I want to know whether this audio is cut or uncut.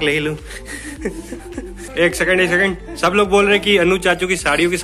uncut